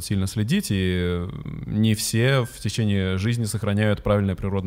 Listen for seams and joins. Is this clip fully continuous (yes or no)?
yes